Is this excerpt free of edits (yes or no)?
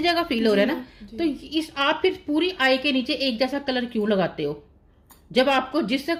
yes